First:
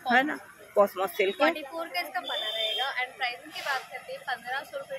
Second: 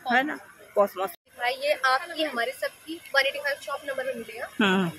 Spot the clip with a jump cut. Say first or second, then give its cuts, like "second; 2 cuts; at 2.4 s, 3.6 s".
second; 1 cut; at 1.2 s